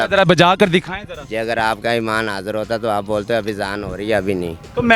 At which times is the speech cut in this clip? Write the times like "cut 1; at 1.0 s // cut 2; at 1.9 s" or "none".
none